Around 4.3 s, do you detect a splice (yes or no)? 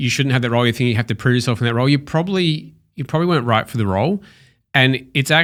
no